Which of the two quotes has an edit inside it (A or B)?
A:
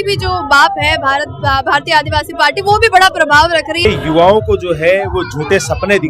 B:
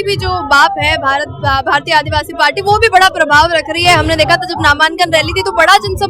A